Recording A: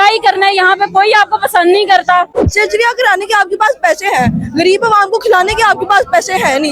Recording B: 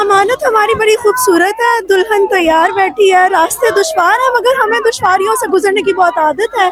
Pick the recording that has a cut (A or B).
A